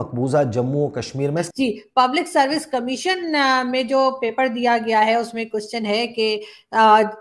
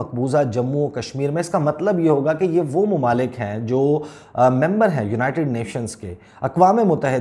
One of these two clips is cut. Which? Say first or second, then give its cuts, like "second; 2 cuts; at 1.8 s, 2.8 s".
first; 1 cut; at 1.4 s